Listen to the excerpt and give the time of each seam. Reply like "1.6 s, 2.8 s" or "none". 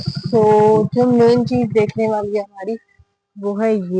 none